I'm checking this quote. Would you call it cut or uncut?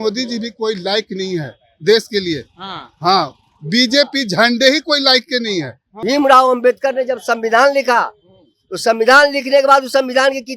cut